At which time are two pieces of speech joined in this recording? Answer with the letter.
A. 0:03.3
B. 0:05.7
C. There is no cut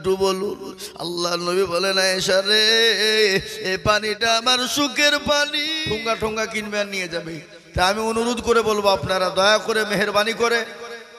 B